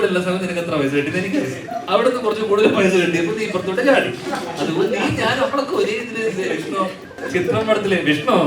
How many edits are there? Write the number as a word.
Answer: one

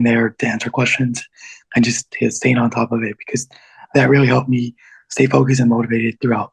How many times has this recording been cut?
zero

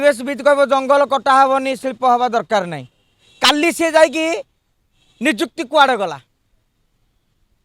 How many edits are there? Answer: zero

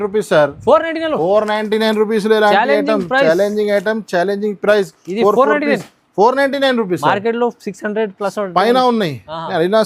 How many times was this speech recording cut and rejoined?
zero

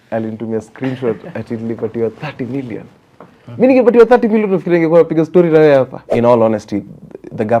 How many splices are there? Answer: one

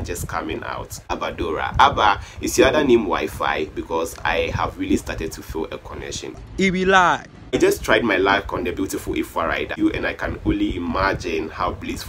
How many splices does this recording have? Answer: three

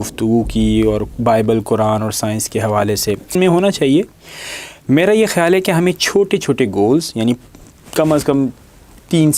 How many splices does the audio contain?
one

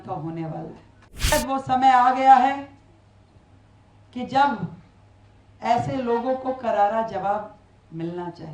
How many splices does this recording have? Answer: one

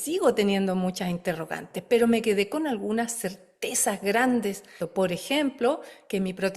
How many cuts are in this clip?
one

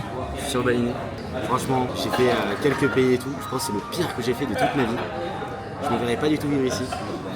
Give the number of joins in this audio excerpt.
one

